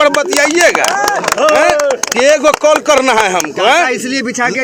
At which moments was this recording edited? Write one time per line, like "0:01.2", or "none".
none